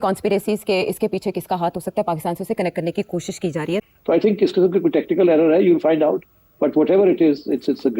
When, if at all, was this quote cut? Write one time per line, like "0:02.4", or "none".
0:03.9